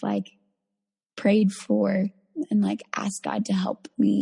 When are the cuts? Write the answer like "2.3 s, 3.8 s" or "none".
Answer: 2.2 s